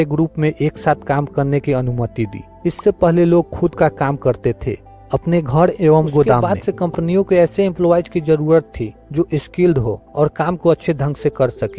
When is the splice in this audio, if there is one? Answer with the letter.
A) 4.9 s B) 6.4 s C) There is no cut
B